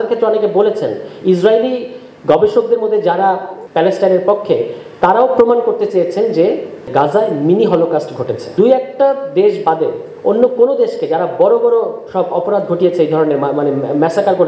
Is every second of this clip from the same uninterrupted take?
no; 3 cuts; at 3.6 s, 6.9 s, 8.4 s

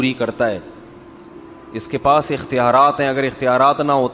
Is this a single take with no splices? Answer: yes; 0 cuts

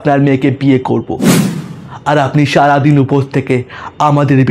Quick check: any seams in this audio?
no; 0 cuts

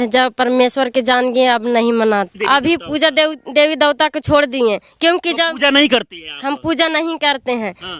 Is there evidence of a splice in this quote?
yes; 1 cut; at 2.3 s

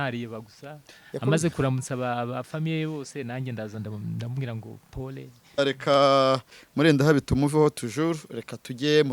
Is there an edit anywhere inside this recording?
yes; 1 cut; at 5.6 s

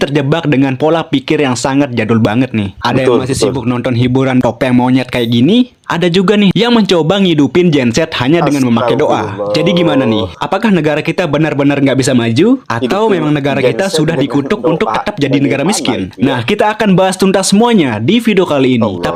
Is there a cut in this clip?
no; 0 cuts

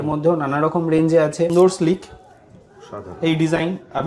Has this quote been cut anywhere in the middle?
yes; 1 cut; at 1.5 s

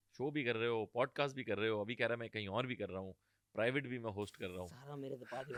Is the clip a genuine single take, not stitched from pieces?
yes; 0 cuts

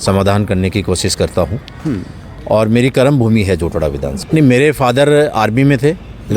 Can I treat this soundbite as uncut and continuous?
no; 1 cut; at 4.1 s

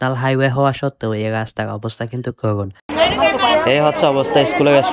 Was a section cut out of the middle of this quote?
yes; 1 cut; at 2.9 s

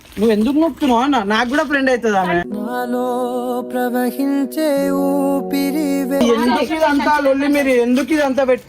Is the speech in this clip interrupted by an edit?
yes; 1 cut; at 6.2 s

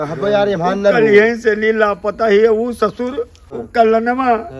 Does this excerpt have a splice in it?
yes; 1 cut; at 3.6 s

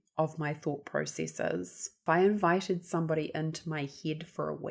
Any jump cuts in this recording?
yes; 1 cut; at 2.0 s

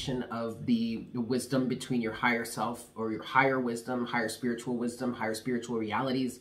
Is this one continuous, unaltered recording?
yes; 0 cuts

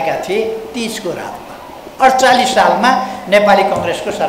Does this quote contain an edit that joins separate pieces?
no; 0 cuts

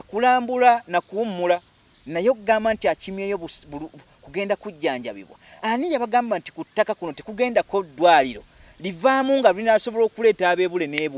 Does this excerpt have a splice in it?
no; 0 cuts

